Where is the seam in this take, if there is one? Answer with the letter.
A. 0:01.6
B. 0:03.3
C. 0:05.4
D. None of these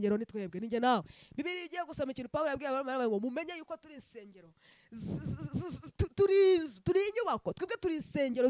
D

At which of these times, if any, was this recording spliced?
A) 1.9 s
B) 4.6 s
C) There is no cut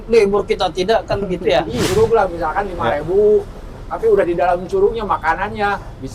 A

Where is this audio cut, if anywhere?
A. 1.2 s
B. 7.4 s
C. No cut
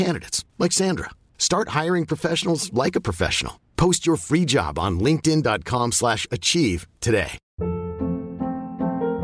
B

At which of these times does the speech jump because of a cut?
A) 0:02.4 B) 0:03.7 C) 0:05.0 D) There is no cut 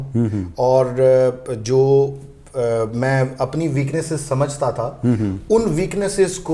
D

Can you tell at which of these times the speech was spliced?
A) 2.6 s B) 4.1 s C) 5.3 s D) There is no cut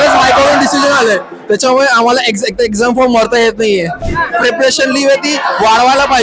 B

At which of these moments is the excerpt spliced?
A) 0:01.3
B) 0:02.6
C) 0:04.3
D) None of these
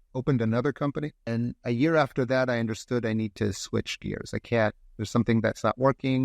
A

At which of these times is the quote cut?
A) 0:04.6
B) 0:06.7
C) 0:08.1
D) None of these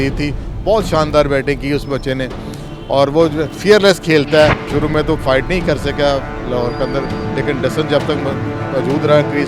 A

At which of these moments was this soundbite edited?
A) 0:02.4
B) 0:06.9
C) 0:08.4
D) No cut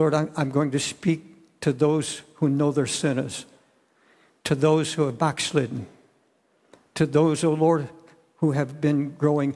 C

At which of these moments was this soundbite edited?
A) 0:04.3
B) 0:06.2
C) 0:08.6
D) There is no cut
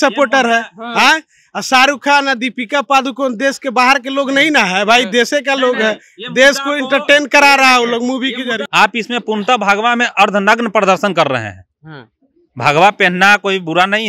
C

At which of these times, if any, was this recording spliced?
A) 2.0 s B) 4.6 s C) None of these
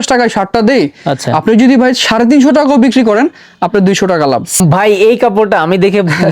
B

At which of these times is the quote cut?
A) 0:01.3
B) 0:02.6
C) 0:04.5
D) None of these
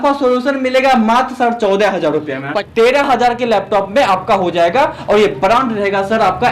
B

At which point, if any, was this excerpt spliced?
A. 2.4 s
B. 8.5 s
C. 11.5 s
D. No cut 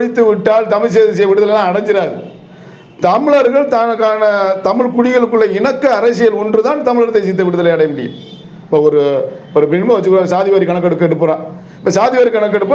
D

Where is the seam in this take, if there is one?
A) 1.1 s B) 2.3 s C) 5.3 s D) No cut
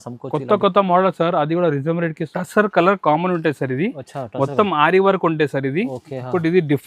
B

